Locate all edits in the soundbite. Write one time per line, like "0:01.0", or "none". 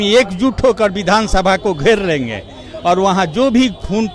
none